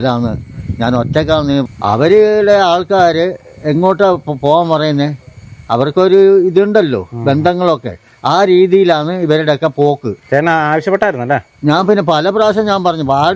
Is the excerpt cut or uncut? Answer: cut